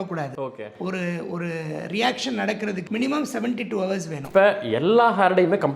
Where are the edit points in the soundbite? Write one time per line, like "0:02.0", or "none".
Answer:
0:02.8
0:04.2